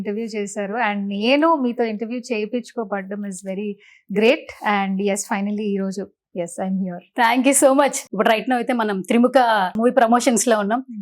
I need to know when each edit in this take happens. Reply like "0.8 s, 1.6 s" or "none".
8.0 s, 9.8 s